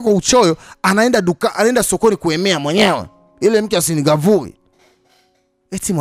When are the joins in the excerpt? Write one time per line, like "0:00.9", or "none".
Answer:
none